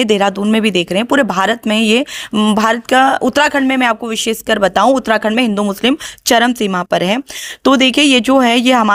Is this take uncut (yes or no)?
yes